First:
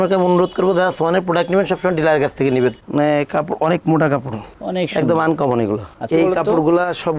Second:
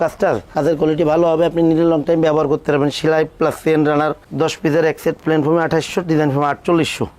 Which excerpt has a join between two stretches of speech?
first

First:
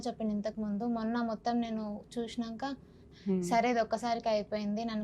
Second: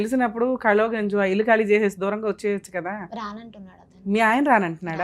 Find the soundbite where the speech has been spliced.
first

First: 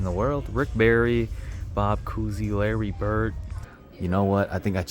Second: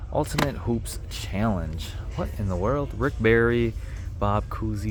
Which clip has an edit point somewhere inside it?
first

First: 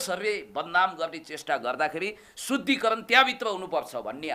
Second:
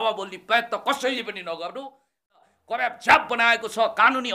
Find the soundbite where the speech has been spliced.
second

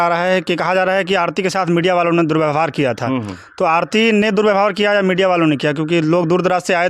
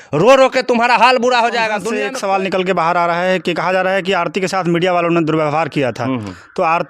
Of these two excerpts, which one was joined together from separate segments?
second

